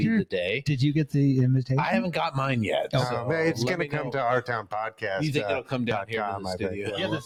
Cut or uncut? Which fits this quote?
uncut